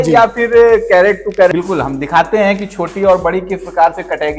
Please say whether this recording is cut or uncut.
cut